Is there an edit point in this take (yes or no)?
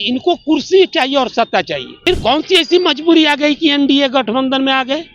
yes